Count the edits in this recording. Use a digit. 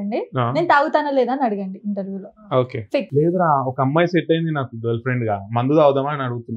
1